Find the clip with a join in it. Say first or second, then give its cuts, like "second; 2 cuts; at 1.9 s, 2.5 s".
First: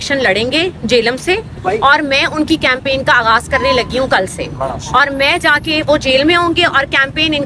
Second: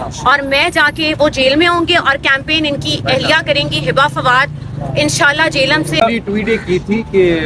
second; 1 cut; at 6.0 s